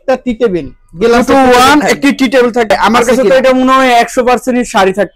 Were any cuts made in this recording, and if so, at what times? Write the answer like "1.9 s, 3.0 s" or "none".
2.7 s